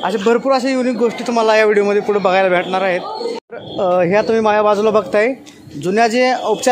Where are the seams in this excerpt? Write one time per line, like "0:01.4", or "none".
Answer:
0:03.3